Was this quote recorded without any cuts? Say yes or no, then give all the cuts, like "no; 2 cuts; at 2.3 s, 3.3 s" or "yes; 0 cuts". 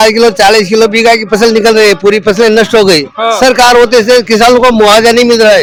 yes; 0 cuts